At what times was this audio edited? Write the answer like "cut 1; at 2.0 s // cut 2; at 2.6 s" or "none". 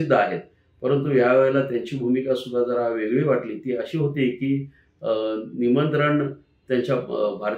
none